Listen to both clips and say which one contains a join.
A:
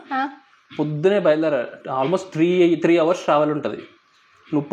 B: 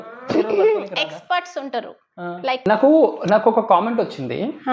B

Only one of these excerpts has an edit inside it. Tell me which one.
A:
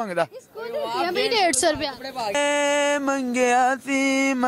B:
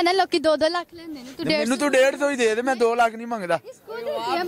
A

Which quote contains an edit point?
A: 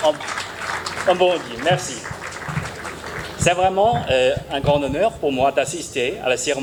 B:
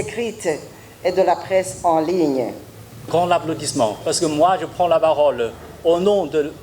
B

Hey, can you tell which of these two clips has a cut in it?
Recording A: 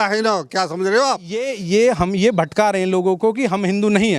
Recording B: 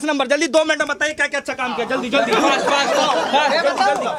A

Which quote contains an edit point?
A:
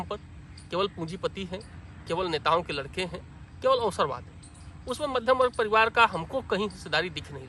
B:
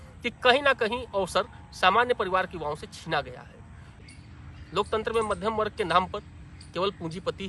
B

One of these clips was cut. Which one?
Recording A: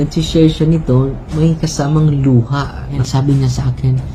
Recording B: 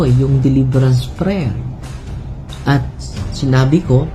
A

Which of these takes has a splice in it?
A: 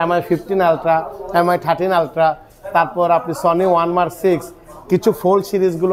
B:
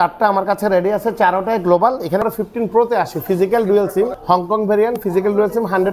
B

